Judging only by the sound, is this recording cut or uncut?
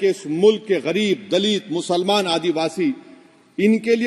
uncut